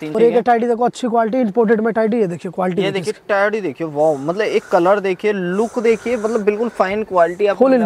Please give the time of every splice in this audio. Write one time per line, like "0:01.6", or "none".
none